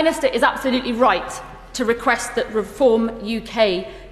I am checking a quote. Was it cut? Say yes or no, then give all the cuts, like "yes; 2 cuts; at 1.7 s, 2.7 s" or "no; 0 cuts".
no; 0 cuts